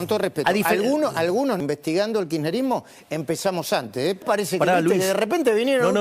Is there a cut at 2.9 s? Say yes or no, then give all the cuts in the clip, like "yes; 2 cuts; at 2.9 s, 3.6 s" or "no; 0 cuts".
no; 2 cuts; at 1.6 s, 4.2 s